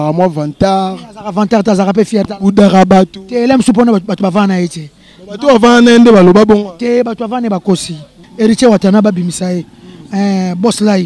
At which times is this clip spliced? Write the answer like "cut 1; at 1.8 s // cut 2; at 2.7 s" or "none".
cut 1; at 8.2 s